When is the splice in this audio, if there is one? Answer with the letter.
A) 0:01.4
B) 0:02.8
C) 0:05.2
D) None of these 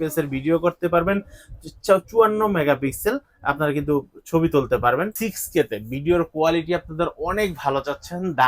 C